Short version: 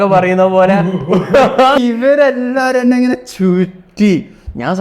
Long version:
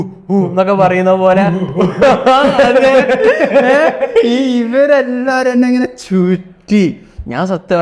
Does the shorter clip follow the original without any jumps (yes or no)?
no